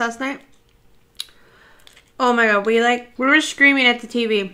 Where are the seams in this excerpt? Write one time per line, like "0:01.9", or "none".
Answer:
0:03.1